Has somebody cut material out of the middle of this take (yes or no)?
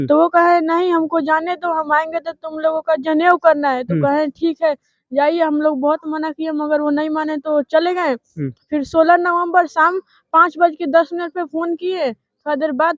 no